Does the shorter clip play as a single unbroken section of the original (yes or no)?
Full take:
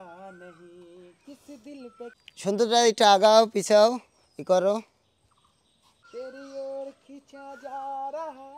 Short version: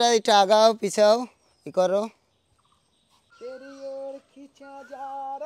yes